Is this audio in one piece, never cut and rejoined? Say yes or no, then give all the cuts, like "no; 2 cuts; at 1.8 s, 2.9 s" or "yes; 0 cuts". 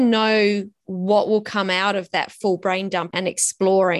no; 1 cut; at 3.1 s